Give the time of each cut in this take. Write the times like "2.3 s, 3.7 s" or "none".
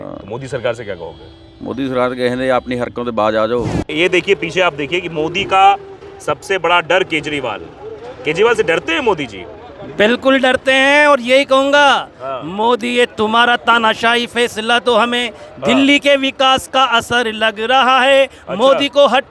3.9 s

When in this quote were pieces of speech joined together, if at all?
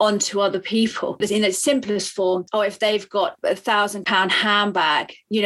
none

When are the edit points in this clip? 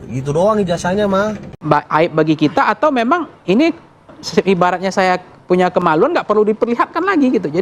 1.5 s

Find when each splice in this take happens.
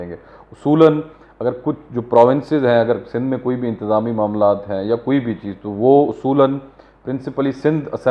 none

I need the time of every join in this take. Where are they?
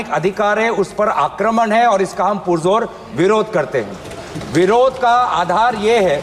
none

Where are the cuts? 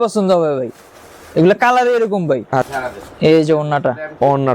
2.7 s

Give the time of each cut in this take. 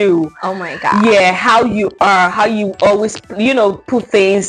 none

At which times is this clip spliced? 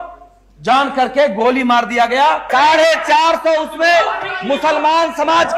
2.5 s

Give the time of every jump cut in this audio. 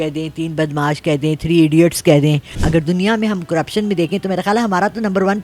2.6 s

